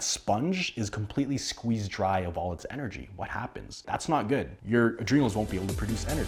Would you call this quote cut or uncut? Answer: uncut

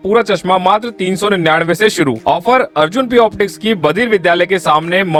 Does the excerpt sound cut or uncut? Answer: uncut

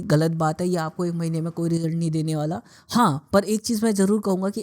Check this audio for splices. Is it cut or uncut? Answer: uncut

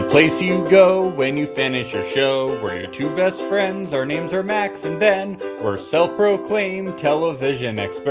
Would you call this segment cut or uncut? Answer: uncut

